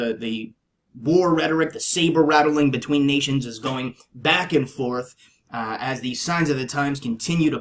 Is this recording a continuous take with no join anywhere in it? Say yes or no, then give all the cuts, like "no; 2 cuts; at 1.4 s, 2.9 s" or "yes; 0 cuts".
no; 1 cut; at 5.3 s